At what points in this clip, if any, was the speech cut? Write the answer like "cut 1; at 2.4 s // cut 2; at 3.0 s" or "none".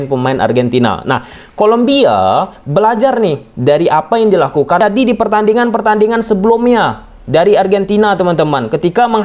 cut 1; at 4.8 s